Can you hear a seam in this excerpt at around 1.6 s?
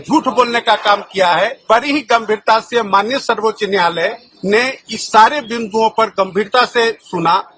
yes; 1 cut; at 1.6 s

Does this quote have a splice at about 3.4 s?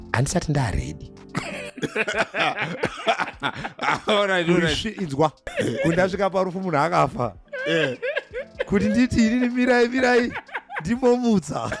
no; 1 cut; at 5.4 s

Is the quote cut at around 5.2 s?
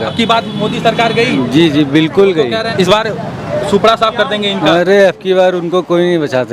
no; 1 cut; at 2.7 s

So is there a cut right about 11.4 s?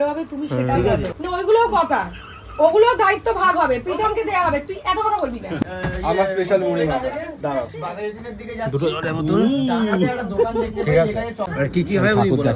yes; 3 cuts; at 1.1 s, 5.6 s, 11.4 s

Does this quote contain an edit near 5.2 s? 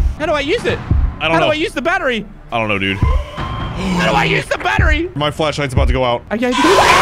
yes; 2 cuts; at 5.2 s, 6.2 s

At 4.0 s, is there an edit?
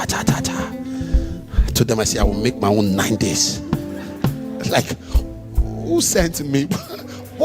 yes; 1 cut; at 4.0 s

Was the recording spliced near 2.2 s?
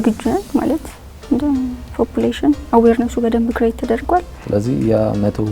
no; 1 cut; at 4.4 s

